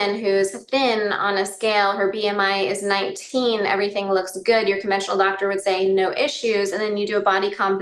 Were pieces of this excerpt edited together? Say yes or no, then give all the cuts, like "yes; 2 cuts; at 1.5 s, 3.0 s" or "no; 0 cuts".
no; 0 cuts